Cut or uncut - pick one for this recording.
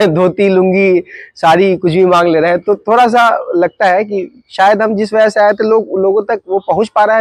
uncut